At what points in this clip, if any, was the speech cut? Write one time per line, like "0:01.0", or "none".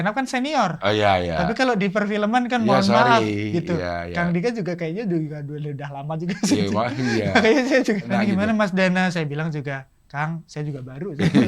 0:08.0